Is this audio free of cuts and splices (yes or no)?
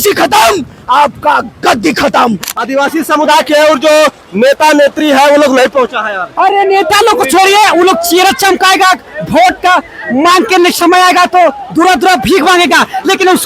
no